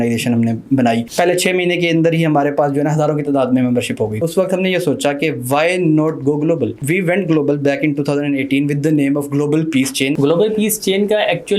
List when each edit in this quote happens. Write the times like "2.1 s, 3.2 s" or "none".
1.1 s, 4.2 s, 6.8 s, 10.2 s